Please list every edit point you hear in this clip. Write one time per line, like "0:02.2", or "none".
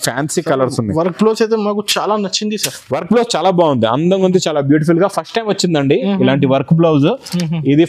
none